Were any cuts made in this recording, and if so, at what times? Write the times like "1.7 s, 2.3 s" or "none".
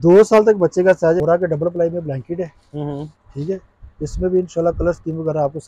1.2 s